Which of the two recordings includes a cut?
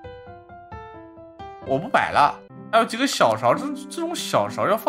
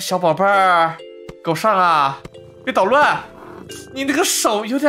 first; 1 cut; at 2.5 s

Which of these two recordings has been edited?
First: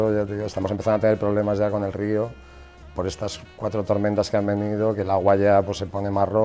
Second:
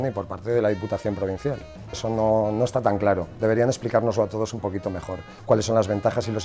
second; 1 cut; at 2.0 s

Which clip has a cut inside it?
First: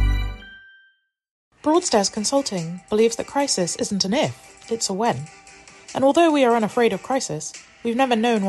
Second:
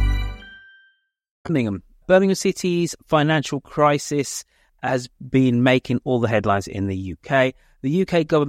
first; 1 cut; at 1.4 s

